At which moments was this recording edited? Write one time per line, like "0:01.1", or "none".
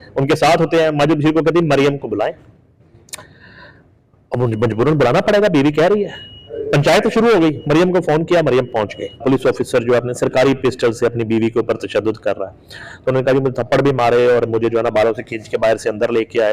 0:09.2